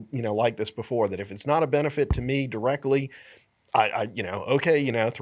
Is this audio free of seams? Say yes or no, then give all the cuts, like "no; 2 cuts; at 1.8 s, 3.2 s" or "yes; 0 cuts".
yes; 0 cuts